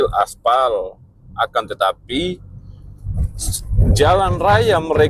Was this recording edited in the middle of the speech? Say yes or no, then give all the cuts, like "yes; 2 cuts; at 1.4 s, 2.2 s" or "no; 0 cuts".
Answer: no; 0 cuts